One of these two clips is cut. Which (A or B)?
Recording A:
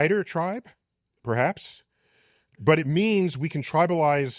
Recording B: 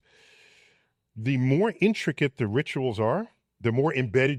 A